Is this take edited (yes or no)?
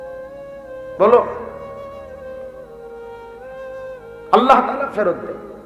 no